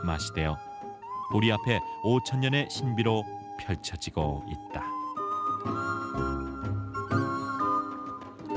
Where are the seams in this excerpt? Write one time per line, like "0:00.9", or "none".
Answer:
none

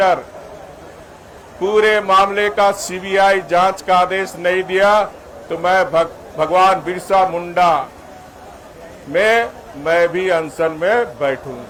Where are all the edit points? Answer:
none

